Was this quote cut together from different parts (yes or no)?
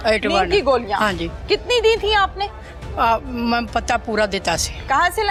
no